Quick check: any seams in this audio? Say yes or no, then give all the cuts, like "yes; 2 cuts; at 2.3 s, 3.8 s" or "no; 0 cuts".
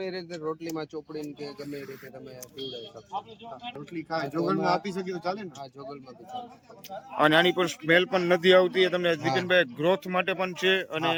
no; 0 cuts